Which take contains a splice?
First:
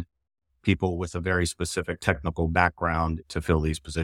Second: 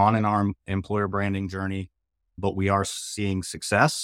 first; 2 cuts; at 1.9 s, 3.2 s

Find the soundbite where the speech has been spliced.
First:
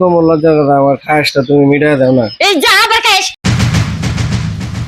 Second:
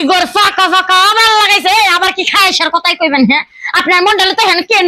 first; 1 cut; at 3.4 s

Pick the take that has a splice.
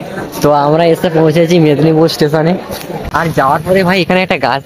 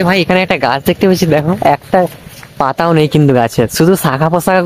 first; 1 cut; at 2.8 s

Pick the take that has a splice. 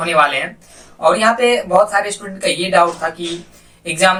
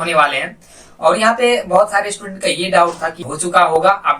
second; 1 cut; at 3.2 s

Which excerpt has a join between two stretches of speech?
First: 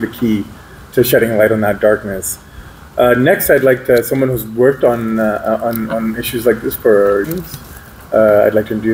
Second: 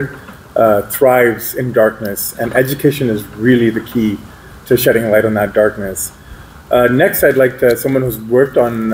first; 1 cut; at 7.3 s

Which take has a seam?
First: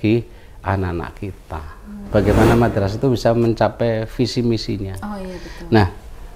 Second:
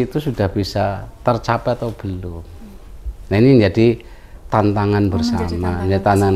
first; 1 cut; at 2.0 s

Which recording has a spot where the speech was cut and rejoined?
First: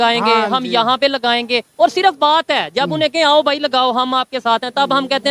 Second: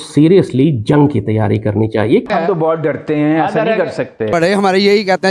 second; 2 cuts; at 2.2 s, 4.3 s

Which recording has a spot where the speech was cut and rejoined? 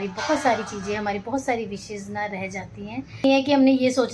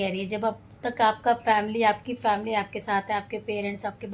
first; 1 cut; at 3.2 s

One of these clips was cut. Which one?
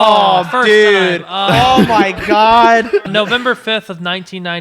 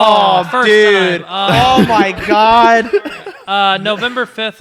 first; 1 cut; at 3.1 s

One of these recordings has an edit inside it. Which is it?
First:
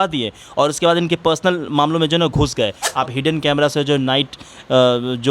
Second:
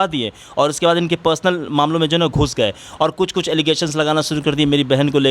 first; 1 cut; at 2.8 s

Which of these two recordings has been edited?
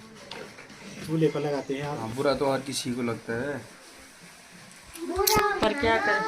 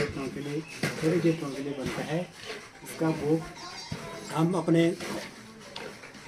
first; 1 cut; at 2.0 s

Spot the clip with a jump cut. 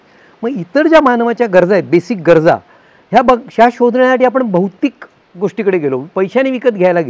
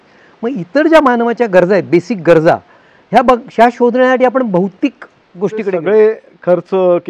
second; 1 cut; at 5.7 s

